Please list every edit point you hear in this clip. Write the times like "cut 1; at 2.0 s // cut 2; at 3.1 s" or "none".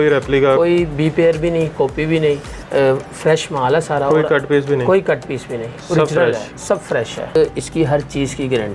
cut 1; at 7.4 s

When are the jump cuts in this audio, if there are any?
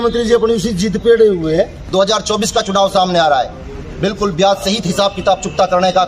cut 1; at 1.8 s

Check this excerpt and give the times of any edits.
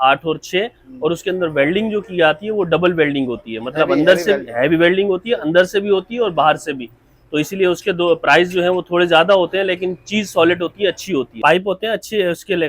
cut 1; at 11.4 s

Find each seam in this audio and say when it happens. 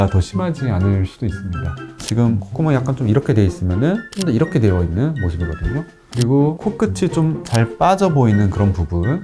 cut 1; at 1.9 s

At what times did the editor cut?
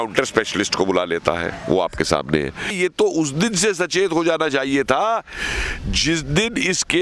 cut 1; at 2.8 s

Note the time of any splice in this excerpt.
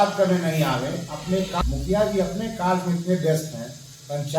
cut 1; at 1.6 s

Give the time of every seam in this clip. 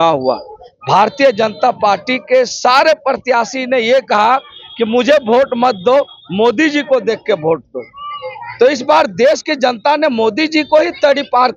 none

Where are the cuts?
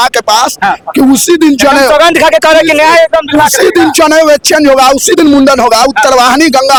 none

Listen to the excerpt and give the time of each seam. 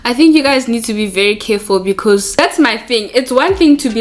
cut 1; at 2.3 s

